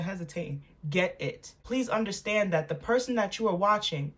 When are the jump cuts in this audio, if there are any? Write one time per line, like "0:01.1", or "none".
0:01.6